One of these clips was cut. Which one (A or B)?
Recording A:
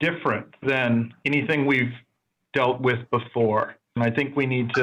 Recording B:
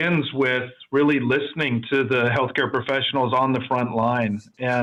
A